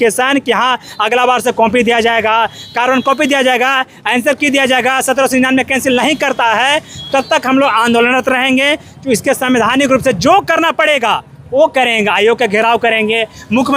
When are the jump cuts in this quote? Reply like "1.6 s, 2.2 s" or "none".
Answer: none